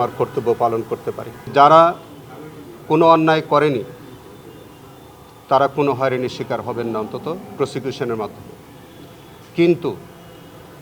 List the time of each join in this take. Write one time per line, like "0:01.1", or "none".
0:01.5